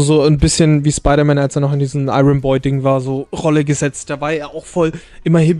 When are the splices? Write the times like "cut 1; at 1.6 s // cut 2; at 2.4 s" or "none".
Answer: none